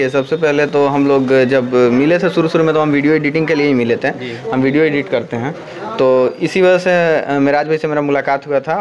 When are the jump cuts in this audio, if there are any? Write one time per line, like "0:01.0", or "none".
none